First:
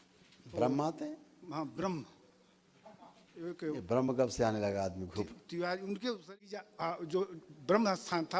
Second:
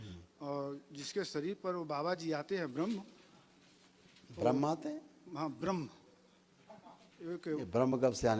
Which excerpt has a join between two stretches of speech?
first; 1 cut; at 6.6 s

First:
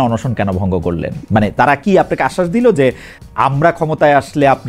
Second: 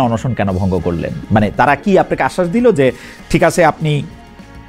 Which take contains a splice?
first; 1 cut; at 3.1 s

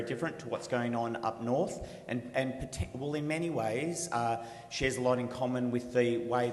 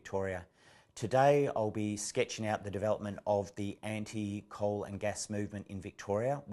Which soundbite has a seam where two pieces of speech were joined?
first; 1 cut; at 1.8 s

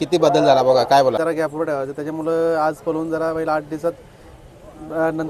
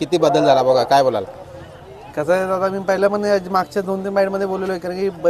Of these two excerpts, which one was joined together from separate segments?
first; 1 cut; at 1.2 s

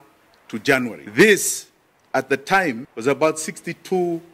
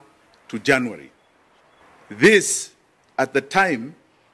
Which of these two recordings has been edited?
first; 2 cuts; at 1.0 s, 2.9 s

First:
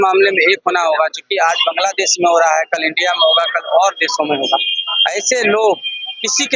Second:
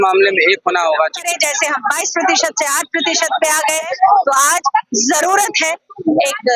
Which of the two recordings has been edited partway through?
second; 2 cuts; at 1.3 s, 3.9 s

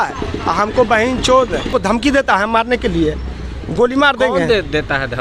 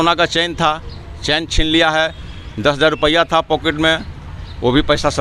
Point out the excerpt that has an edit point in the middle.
first; 1 cut; at 1.7 s

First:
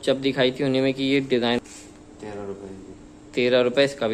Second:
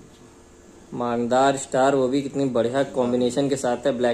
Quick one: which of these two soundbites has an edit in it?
first; 1 cut; at 1.6 s

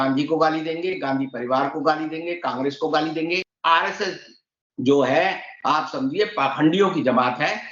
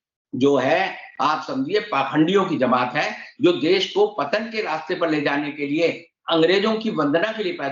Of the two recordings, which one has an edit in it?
first; 1 cut; at 3.5 s

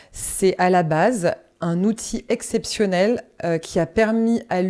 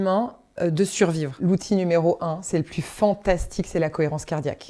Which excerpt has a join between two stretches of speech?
second; 1 cut; at 1.4 s

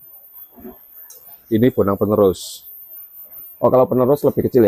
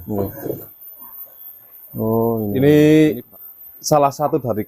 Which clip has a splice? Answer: second; 1 cut; at 2.5 s

